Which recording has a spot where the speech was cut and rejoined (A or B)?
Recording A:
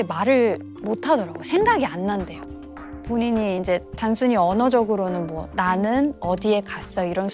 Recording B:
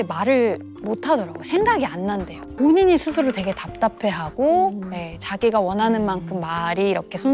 B